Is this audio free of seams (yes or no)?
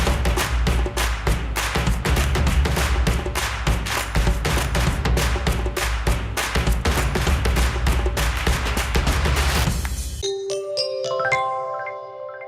no